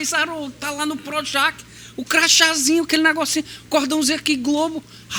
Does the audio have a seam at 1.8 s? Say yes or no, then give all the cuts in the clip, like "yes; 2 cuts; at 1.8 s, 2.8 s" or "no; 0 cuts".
no; 0 cuts